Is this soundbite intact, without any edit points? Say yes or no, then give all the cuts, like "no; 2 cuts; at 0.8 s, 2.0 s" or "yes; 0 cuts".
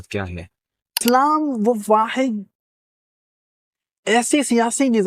no; 1 cut; at 1.0 s